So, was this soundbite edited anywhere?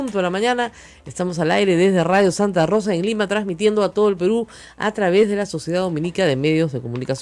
no; 0 cuts

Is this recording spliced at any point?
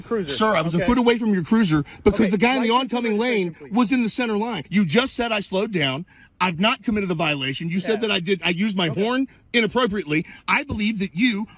yes; 1 cut; at 4.6 s

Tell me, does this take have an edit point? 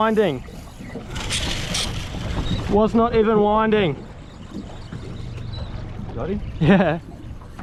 no; 0 cuts

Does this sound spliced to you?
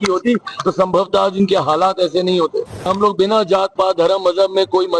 yes; 1 cut; at 2.9 s

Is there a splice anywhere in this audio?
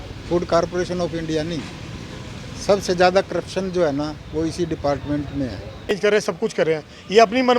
yes; 1 cut; at 6.0 s

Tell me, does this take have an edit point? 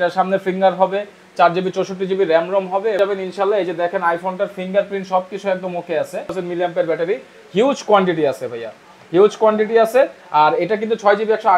yes; 2 cuts; at 3.0 s, 6.3 s

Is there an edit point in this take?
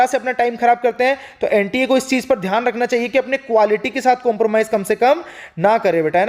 no; 0 cuts

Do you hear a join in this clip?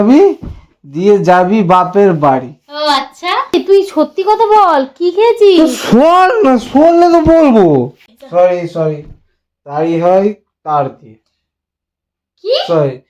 yes; 2 cuts; at 3.5 s, 8.1 s

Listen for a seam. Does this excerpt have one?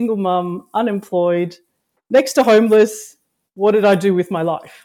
no; 0 cuts

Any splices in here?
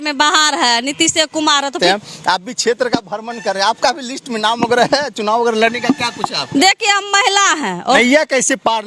yes; 2 cuts; at 1.8 s, 8.0 s

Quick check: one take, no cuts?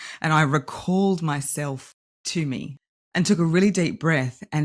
no; 1 cut; at 2.8 s

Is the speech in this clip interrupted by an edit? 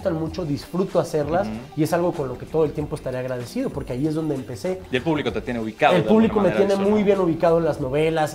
no; 0 cuts

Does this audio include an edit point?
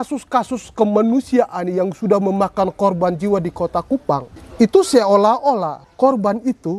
yes; 2 cuts; at 4.4 s, 5.8 s

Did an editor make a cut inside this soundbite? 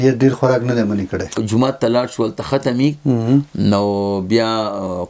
yes; 1 cut; at 1.4 s

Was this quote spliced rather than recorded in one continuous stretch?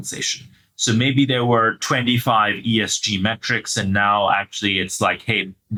no; 0 cuts

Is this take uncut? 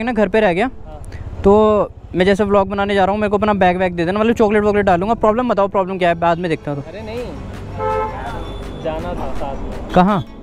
yes; 0 cuts

